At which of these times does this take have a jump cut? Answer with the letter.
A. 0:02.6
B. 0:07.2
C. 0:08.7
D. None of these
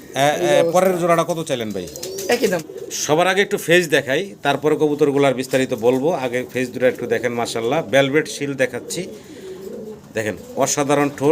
A